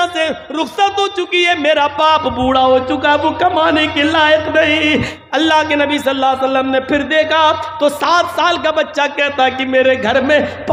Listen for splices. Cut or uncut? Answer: cut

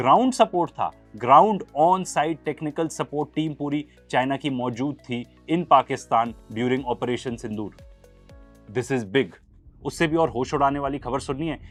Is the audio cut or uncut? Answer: uncut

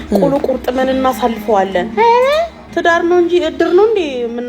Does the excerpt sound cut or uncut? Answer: cut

